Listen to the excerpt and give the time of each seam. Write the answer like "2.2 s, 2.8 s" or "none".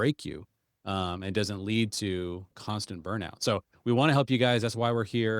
2.5 s